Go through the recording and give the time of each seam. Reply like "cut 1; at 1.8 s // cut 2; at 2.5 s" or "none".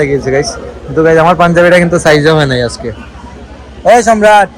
none

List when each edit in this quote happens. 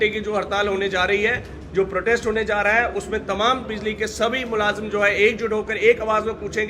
none

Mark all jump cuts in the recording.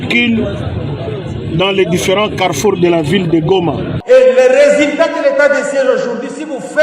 cut 1; at 3.9 s

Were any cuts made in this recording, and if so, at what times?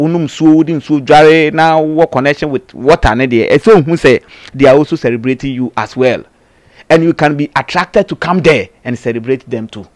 none

